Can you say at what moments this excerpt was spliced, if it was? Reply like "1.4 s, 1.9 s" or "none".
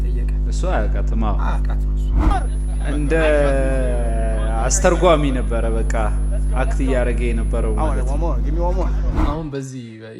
2.3 s, 9.1 s